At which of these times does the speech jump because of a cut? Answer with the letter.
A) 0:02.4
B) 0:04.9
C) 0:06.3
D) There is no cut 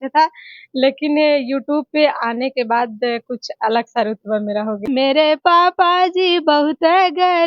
B